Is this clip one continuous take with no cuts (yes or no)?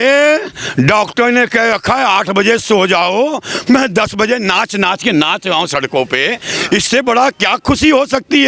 yes